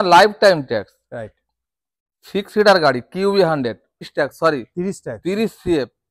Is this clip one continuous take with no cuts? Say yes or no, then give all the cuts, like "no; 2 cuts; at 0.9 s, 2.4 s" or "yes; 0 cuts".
no; 1 cut; at 4.1 s